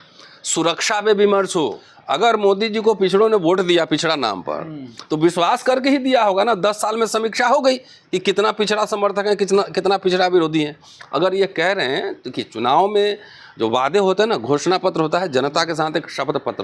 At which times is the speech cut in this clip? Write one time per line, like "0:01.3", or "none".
0:01.9